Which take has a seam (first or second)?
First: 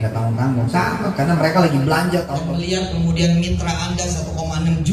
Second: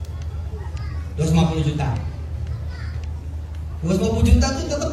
first